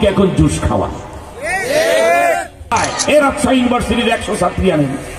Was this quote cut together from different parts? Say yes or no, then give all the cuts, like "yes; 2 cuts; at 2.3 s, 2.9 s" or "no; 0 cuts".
yes; 1 cut; at 2.7 s